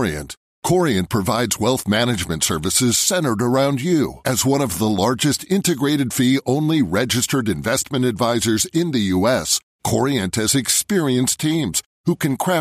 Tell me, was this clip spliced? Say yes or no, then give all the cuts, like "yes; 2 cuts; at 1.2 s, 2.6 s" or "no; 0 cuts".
no; 0 cuts